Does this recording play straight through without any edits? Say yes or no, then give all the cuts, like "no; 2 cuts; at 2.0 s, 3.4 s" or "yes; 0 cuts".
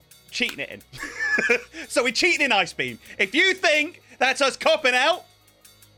yes; 0 cuts